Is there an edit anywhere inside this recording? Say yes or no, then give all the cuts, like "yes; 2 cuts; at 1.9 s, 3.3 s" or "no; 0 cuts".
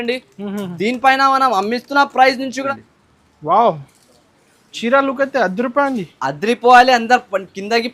yes; 1 cut; at 2.6 s